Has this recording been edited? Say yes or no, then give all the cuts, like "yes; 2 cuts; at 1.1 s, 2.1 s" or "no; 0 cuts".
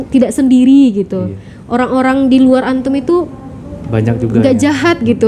no; 0 cuts